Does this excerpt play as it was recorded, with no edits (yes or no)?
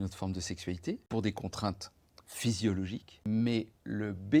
no